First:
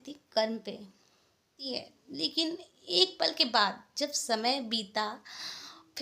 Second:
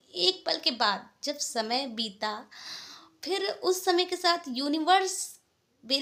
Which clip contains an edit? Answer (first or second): first